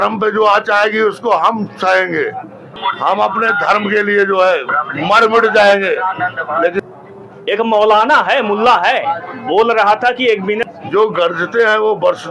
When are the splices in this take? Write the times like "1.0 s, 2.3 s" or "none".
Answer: 2.8 s, 6.8 s, 10.6 s